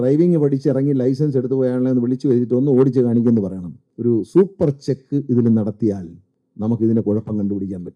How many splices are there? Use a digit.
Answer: 1